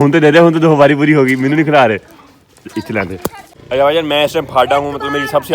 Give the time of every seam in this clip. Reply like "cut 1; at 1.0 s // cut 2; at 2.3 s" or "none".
cut 1; at 3.5 s